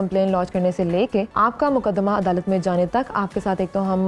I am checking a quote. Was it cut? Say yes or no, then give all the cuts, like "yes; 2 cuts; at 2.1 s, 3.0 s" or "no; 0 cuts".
yes; 1 cut; at 1.3 s